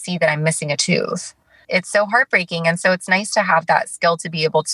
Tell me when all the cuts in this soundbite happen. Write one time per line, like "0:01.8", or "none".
0:01.6